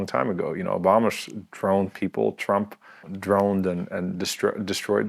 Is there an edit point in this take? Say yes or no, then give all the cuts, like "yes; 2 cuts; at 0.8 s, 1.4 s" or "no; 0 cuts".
yes; 1 cut; at 3.1 s